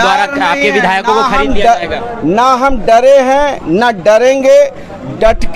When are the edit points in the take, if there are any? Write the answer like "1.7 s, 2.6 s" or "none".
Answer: none